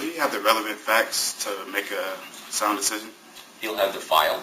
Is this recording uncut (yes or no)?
yes